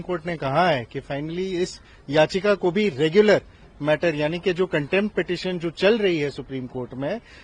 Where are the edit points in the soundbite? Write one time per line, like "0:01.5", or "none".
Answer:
none